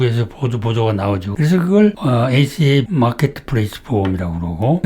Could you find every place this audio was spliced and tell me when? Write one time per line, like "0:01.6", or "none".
0:01.3
0:02.0

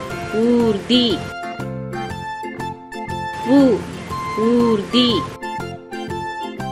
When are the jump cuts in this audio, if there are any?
none

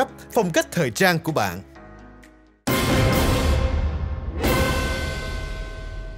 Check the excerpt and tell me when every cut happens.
0:02.6

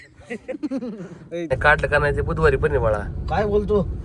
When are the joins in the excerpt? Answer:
0:01.5

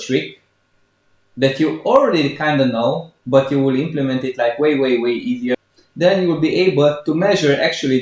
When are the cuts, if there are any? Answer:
0:05.6

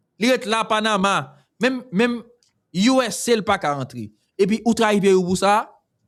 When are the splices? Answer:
none

